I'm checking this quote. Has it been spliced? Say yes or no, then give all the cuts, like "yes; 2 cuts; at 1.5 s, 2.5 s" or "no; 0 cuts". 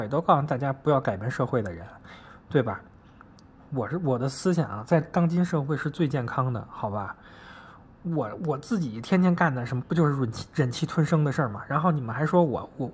no; 0 cuts